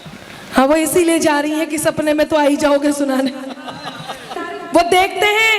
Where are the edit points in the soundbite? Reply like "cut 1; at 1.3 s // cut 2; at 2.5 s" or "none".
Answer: cut 1; at 4.5 s